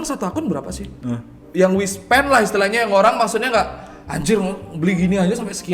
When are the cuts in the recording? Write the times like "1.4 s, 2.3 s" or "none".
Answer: 1.3 s